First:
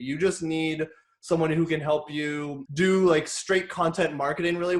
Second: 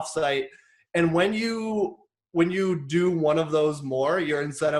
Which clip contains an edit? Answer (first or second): first